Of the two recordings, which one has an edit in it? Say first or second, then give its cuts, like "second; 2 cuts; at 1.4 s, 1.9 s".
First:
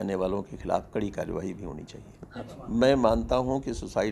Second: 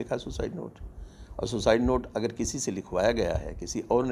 first; 1 cut; at 2.5 s